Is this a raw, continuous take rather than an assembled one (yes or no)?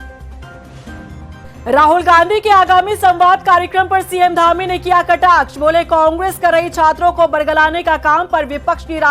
no